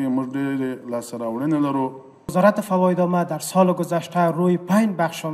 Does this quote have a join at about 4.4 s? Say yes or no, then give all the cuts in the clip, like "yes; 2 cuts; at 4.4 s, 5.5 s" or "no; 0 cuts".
no; 1 cut; at 2.1 s